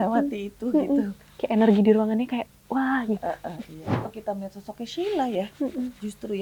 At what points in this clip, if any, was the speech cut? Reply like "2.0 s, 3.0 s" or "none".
4.1 s